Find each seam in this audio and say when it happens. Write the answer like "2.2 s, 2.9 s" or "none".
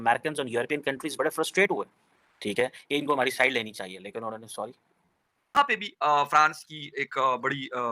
5.5 s

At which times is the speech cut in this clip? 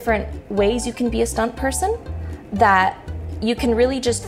none

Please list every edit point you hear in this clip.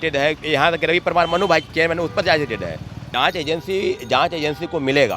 3.0 s

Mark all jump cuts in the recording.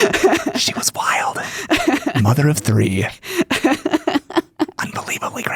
none

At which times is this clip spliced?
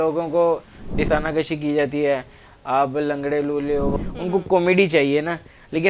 1.1 s, 4.0 s

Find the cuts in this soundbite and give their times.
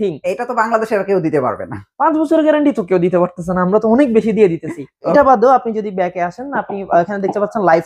5.1 s

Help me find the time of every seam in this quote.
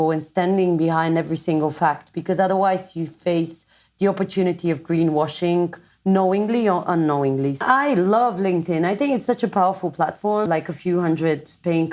7.6 s, 10.5 s

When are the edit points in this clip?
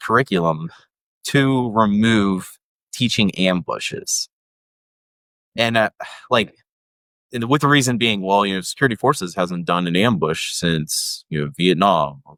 none

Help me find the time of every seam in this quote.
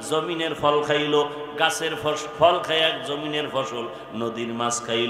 none

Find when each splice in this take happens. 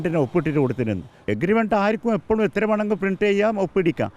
1.2 s

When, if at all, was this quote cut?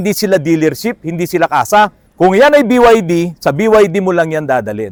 none

